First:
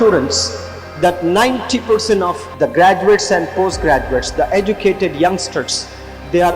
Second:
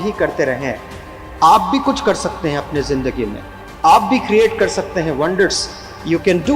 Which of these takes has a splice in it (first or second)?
first